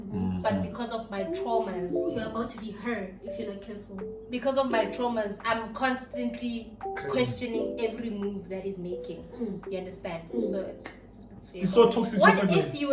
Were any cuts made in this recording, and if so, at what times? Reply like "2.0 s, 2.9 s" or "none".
11.5 s